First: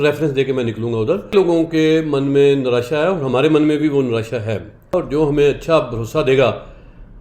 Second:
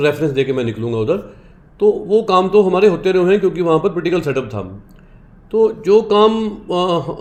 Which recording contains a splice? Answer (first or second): first